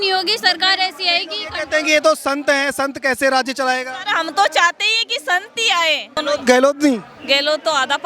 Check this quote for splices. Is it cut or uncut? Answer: cut